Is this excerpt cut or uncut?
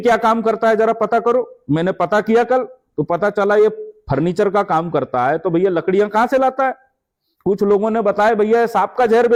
uncut